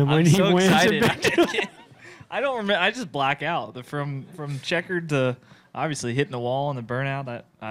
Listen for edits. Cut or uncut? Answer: uncut